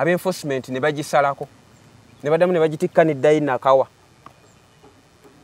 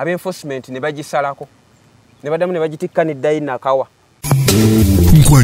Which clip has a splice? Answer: second; 1 cut; at 4.2 s

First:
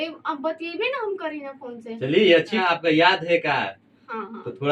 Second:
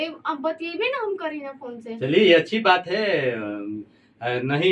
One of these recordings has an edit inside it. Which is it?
first; 1 cut; at 2.6 s

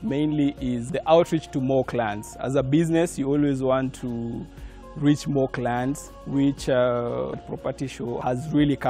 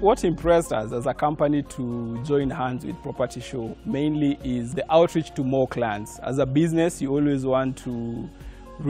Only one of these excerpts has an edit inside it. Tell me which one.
first; 2 cuts; at 6.1 s, 7.5 s

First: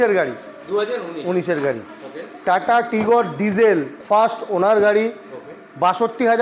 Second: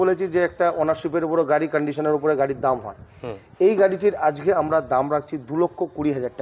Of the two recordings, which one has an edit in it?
first; 1 cut; at 3.9 s

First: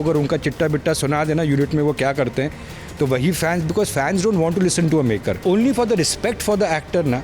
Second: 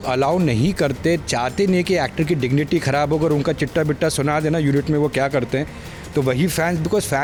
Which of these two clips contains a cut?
first; 1 cut; at 5.4 s

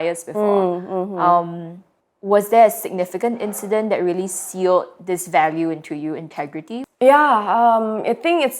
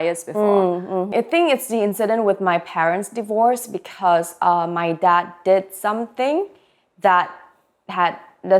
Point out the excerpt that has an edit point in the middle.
second; 1 cut; at 1.1 s

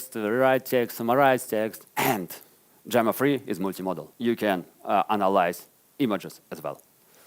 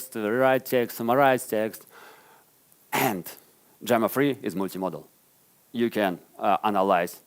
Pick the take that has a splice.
first; 2 cuts; at 1.8 s, 4.1 s

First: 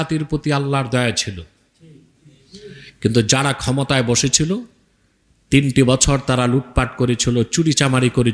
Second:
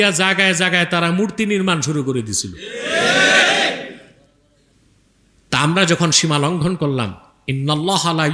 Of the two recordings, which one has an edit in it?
second; 1 cut; at 4.7 s

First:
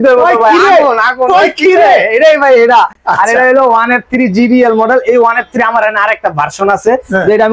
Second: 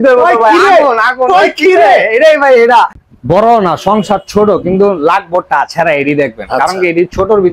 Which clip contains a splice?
second; 1 cut; at 3.0 s

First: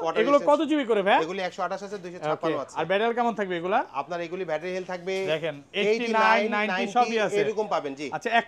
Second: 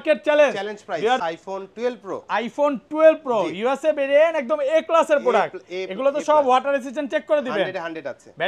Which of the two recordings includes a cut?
second; 1 cut; at 1.2 s

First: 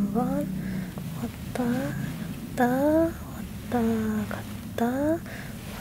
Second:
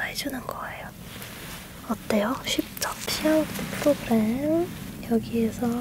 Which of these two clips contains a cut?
second; 1 cut; at 3.1 s

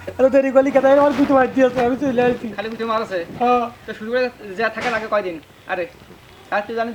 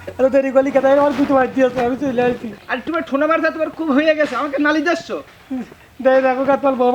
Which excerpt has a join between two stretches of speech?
second; 1 cut; at 2.5 s

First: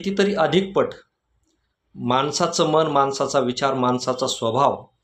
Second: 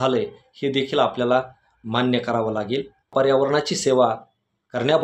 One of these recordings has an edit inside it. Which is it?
second; 1 cut; at 3.1 s

